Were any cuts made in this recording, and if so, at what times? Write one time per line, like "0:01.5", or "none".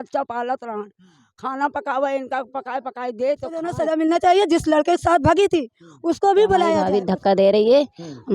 0:03.7
0:06.8